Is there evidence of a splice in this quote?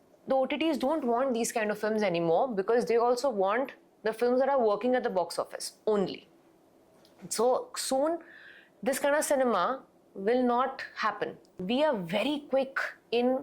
yes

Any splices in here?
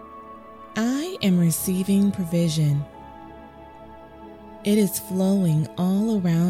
no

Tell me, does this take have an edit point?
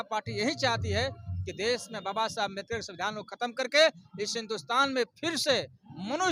no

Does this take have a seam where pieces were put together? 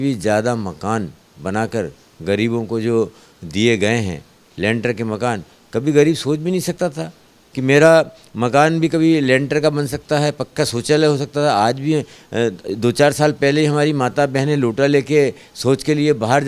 no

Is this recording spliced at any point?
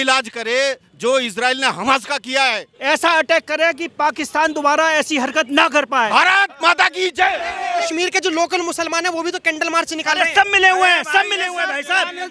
yes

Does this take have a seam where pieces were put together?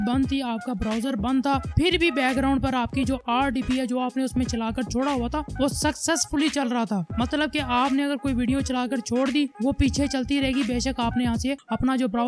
no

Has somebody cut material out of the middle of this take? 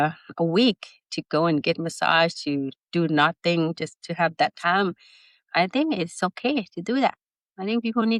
no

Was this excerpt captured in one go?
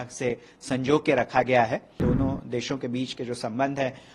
no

